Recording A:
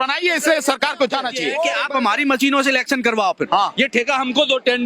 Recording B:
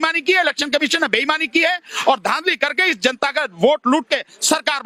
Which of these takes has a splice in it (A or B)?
A